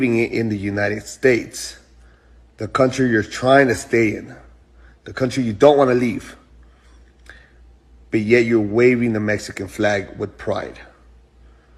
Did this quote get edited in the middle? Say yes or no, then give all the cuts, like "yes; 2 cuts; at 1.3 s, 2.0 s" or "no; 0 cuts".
no; 0 cuts